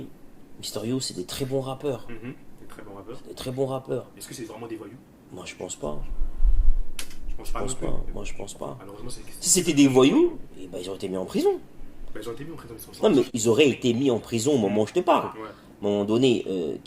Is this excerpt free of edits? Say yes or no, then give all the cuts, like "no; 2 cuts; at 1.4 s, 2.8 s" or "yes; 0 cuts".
no; 1 cut; at 13.3 s